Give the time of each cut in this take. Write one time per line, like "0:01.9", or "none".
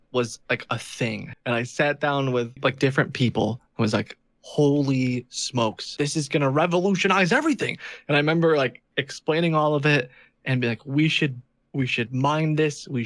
0:01.3
0:02.6
0:05.8

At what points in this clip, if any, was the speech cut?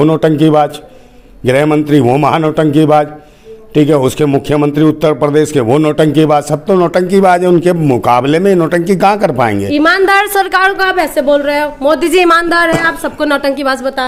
none

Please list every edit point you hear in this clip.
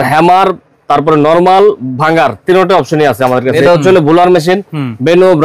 0:03.6

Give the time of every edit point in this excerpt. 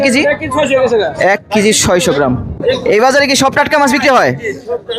0:02.5

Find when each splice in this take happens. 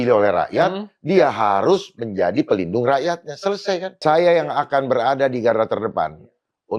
0:04.0

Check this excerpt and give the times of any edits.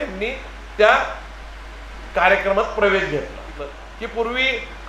0:03.5

